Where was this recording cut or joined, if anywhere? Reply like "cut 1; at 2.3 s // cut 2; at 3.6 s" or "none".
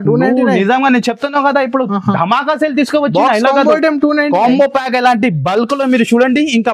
none

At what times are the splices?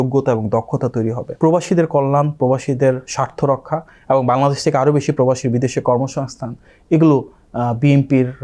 cut 1; at 1.2 s

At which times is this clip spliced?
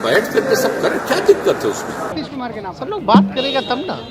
cut 1; at 2.2 s

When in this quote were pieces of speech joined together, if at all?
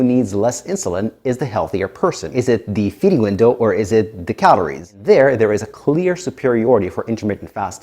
cut 1; at 2.2 s // cut 2; at 4.9 s

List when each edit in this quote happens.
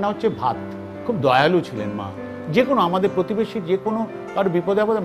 cut 1; at 1.0 s // cut 2; at 2.4 s

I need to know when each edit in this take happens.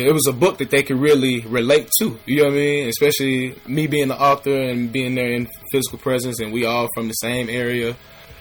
cut 1; at 3.6 s // cut 2; at 5.6 s

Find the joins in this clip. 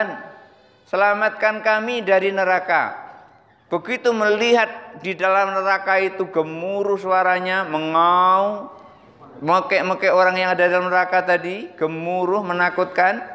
none

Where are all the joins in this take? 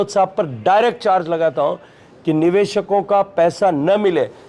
none

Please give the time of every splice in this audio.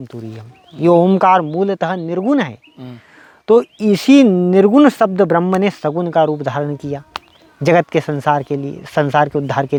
none

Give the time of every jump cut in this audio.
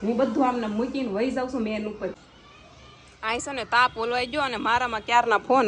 cut 1; at 2.1 s

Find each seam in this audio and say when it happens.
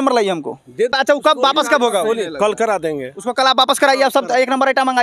cut 1; at 0.9 s

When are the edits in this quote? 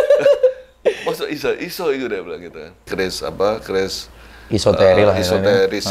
cut 1; at 2.9 s

